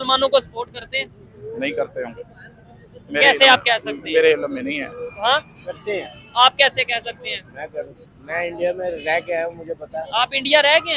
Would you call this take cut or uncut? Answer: uncut